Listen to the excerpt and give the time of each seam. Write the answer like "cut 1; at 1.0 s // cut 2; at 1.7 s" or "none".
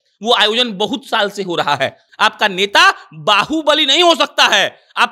cut 1; at 2.0 s